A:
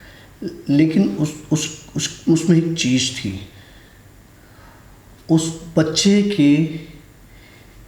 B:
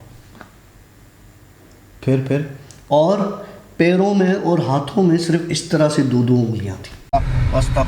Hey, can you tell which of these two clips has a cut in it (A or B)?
B